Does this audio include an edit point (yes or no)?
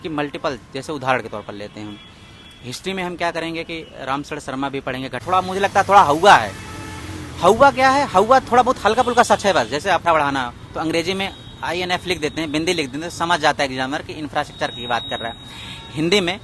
yes